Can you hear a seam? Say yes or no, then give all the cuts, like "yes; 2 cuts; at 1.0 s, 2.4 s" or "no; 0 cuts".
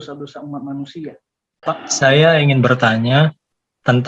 yes; 1 cut; at 1.6 s